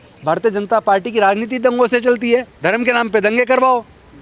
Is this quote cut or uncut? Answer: cut